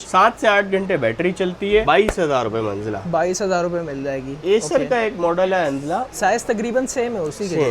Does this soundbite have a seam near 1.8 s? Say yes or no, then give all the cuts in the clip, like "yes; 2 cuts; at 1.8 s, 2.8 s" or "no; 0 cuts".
no; 0 cuts